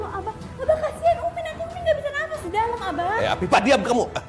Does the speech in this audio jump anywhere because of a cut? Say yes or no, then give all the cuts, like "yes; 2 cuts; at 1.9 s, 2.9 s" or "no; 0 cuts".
no; 0 cuts